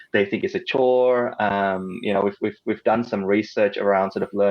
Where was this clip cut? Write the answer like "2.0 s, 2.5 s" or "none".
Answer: none